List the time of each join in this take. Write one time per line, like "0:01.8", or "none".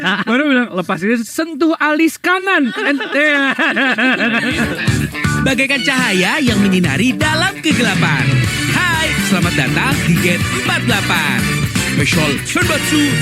0:04.7